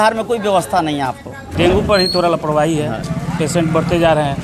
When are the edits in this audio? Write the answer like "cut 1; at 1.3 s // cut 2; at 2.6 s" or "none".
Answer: cut 1; at 1.5 s // cut 2; at 3.0 s

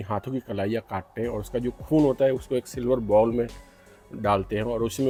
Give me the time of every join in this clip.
none

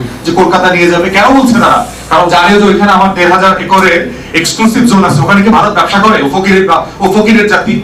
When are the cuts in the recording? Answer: none

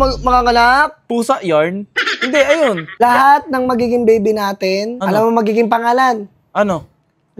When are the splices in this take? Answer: cut 1; at 3.0 s // cut 2; at 4.9 s

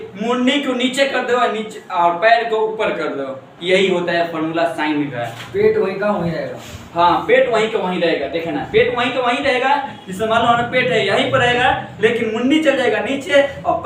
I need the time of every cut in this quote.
none

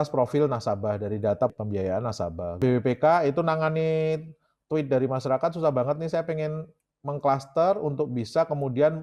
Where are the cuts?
none

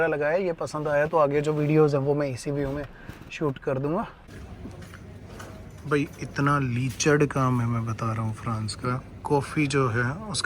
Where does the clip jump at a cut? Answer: cut 1; at 4.2 s

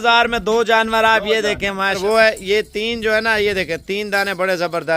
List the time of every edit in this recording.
cut 1; at 2.0 s

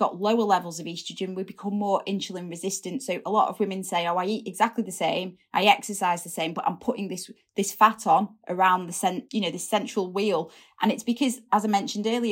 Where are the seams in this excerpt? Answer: none

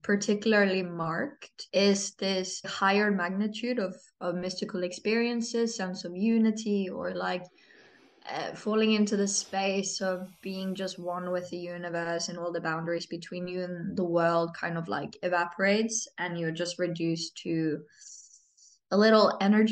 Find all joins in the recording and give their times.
cut 1; at 1.6 s // cut 2; at 2.7 s

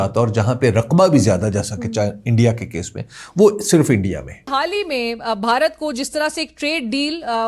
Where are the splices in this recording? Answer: cut 1; at 4.8 s

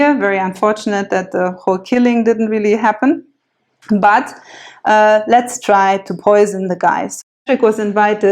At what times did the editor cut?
cut 1; at 7.1 s

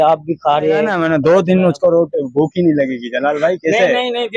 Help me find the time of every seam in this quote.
cut 1; at 0.9 s

